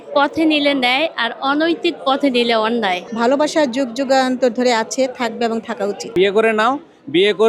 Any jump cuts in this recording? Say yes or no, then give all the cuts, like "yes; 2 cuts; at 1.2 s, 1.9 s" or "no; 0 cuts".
yes; 2 cuts; at 3.1 s, 6.1 s